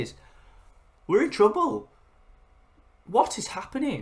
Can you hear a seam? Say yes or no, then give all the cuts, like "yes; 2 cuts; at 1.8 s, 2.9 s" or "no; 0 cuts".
no; 0 cuts